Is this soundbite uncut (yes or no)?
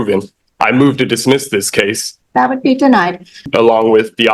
no